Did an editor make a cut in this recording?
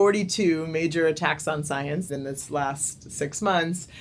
yes; 1 cut; at 2.1 s

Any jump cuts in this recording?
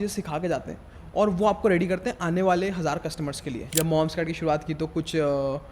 yes; 1 cut; at 3.6 s

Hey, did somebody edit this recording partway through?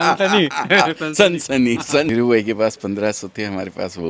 yes; 1 cut; at 2.1 s

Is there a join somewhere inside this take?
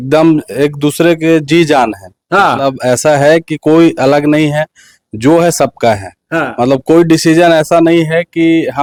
no; 0 cuts

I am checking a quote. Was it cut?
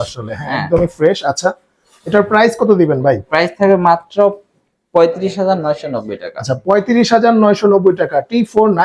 no; 0 cuts

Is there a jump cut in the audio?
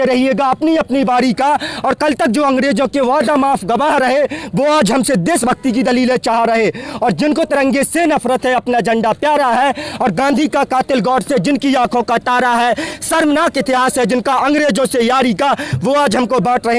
no; 0 cuts

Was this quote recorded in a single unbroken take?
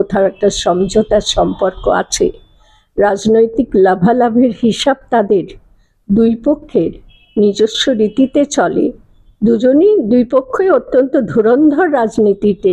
yes; 0 cuts

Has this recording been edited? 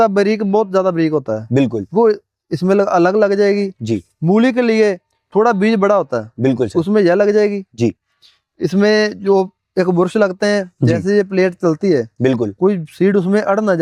no; 0 cuts

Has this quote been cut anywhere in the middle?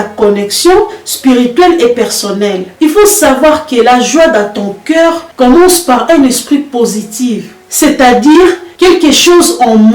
yes; 1 cut; at 2.6 s

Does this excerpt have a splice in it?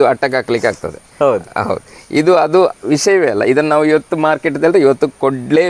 no; 0 cuts

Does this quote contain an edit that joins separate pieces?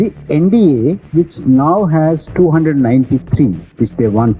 yes; 1 cut; at 1.0 s

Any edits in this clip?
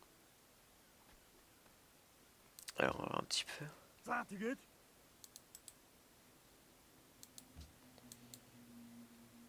no; 0 cuts

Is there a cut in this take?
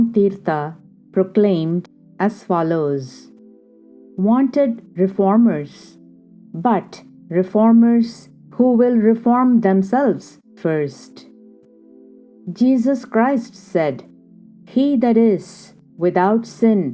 no; 0 cuts

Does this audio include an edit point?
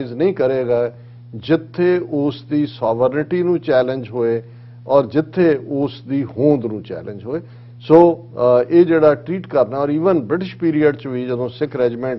no; 0 cuts

